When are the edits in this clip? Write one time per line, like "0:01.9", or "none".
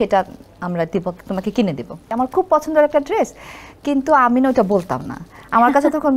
0:02.0